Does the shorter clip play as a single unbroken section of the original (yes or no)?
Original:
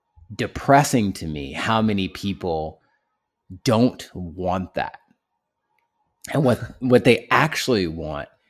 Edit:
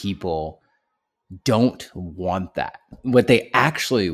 no